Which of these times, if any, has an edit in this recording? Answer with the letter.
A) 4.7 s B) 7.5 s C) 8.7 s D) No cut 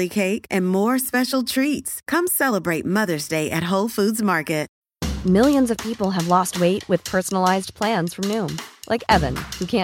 A